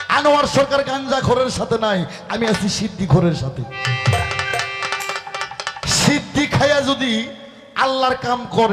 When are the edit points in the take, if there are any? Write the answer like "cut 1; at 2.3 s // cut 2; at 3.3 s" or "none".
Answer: none